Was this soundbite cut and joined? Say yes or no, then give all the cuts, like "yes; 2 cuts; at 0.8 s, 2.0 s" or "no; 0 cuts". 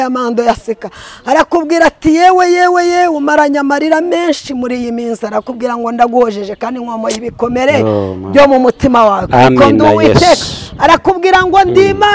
no; 0 cuts